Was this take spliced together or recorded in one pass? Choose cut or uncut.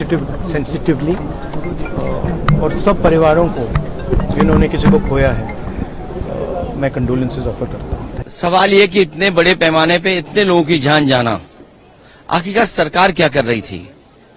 uncut